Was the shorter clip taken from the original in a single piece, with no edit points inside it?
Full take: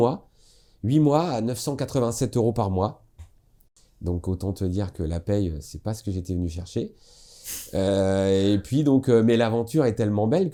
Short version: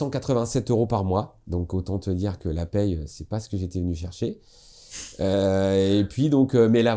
no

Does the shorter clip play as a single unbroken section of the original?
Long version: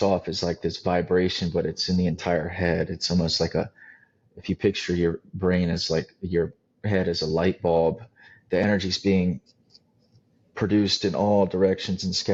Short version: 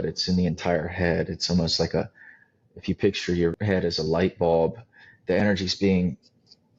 no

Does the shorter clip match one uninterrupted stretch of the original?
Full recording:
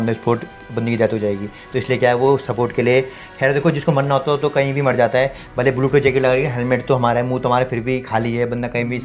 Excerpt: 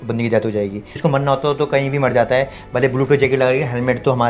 no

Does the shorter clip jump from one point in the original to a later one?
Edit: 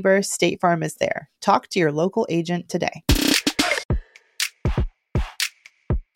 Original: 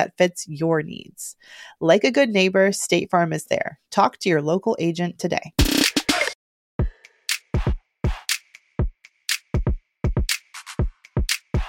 yes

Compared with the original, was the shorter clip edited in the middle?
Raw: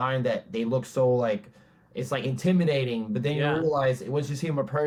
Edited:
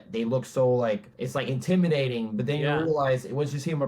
yes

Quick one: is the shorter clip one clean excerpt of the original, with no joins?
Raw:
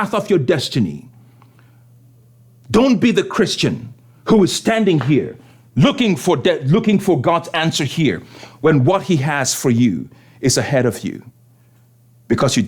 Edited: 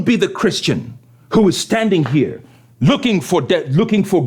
yes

